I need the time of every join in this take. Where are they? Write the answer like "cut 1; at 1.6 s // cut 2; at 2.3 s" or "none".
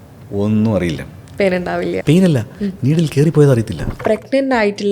cut 1; at 1.9 s // cut 2; at 4.0 s